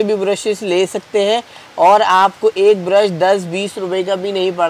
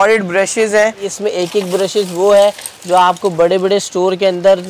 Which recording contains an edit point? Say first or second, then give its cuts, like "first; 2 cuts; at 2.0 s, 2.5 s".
second; 1 cut; at 1.1 s